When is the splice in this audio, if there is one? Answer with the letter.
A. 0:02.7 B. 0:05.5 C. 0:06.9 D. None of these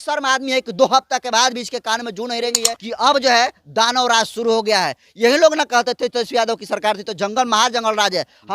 A